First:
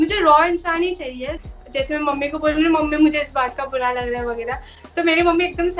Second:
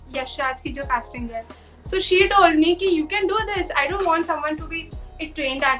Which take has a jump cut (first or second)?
first